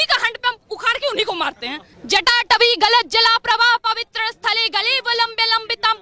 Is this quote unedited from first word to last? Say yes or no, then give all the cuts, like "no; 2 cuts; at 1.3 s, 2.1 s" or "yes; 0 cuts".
no; 1 cut; at 1.9 s